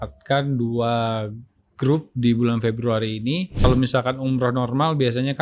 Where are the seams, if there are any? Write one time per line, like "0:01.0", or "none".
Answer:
0:03.6

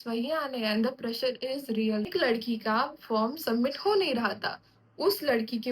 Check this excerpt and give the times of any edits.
0:02.1

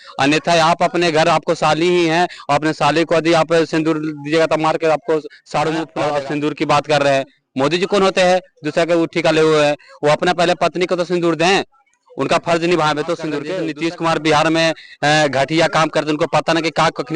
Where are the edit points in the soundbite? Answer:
0:06.0
0:13.5

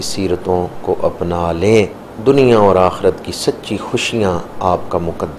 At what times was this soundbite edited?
0:02.0

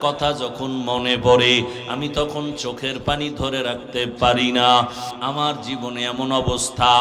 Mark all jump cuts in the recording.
0:05.1

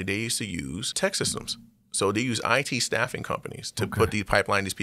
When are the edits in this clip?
0:00.9

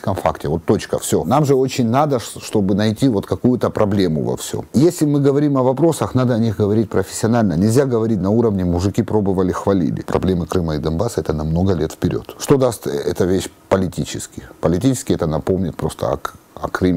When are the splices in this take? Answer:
0:01.2
0:04.7
0:10.0
0:12.3

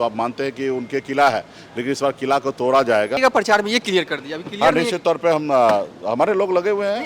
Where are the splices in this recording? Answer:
0:03.2

